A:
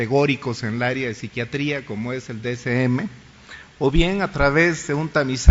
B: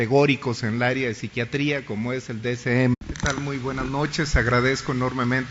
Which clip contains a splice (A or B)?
A